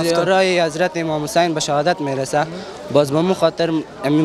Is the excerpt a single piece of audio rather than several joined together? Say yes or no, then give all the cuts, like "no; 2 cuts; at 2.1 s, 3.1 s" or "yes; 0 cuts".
yes; 0 cuts